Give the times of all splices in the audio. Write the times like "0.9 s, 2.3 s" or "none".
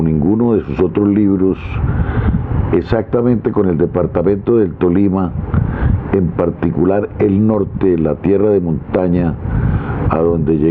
none